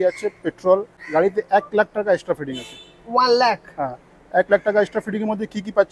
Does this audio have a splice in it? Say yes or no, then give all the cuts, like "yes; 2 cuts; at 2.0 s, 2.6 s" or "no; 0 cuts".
yes; 1 cut; at 1.0 s